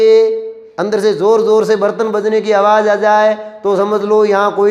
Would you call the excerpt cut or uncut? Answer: uncut